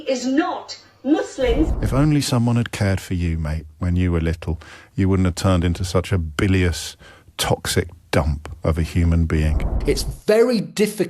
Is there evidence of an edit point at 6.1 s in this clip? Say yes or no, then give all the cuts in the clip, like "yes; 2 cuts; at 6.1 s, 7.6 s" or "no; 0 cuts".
no; 2 cuts; at 1.8 s, 9.7 s